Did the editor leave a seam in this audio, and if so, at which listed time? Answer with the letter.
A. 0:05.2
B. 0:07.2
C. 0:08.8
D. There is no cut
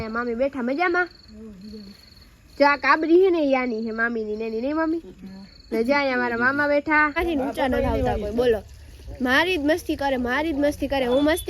B